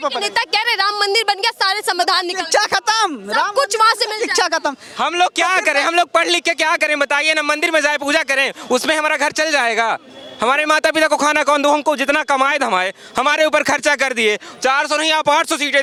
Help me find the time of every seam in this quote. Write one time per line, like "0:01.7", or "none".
none